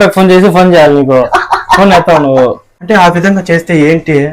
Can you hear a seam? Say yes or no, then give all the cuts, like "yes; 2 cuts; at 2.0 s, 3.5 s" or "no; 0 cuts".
yes; 1 cut; at 2.7 s